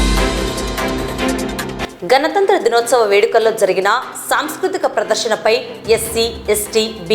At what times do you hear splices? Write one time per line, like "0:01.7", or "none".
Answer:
0:01.6